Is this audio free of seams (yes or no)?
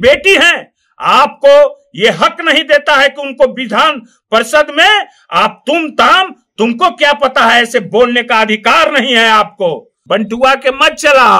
no